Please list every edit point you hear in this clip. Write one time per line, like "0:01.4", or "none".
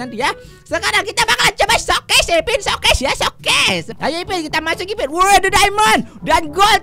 0:03.9